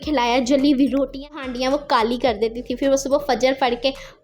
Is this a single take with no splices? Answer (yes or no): no